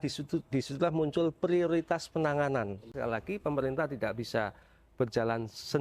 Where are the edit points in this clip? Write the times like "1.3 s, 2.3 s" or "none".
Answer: 2.9 s